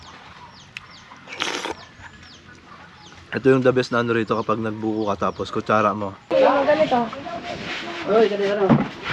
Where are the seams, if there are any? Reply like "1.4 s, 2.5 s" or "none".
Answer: 6.3 s